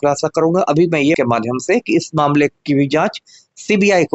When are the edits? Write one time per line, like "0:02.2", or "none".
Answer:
0:01.2